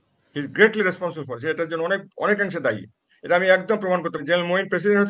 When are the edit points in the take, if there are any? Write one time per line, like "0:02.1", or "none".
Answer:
0:04.2